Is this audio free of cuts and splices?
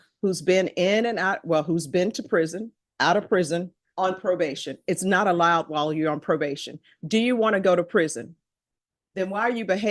yes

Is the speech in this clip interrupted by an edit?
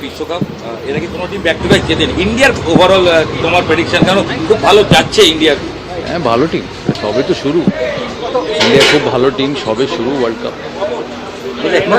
no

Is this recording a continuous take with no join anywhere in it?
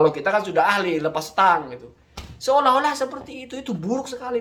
yes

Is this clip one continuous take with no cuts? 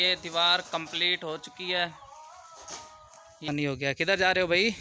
no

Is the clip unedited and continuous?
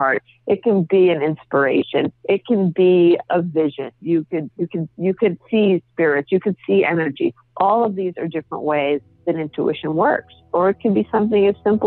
no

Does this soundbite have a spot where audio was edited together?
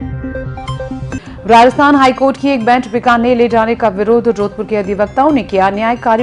no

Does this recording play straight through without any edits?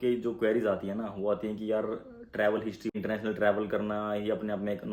no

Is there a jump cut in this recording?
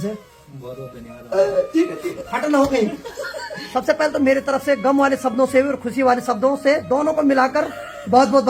yes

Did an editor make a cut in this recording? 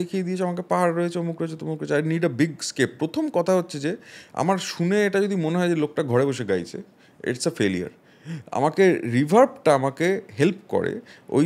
no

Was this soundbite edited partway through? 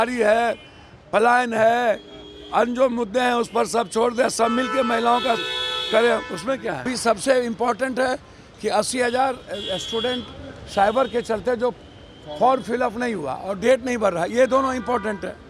yes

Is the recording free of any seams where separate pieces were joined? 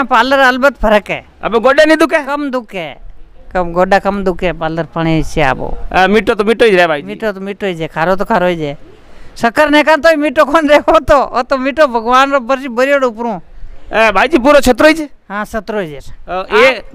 yes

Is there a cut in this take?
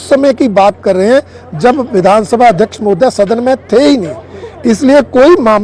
no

